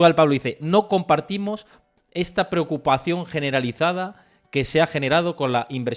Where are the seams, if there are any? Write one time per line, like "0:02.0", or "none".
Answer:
none